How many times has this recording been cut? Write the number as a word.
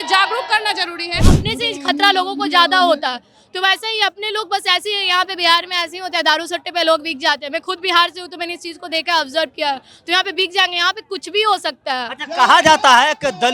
one